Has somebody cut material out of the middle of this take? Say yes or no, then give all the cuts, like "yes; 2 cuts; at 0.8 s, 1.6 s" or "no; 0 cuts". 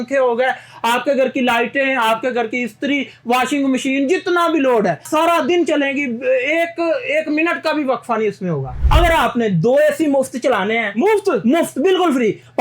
yes; 2 cuts; at 5.1 s, 8.8 s